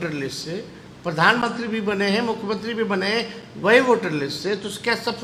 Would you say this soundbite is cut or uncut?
uncut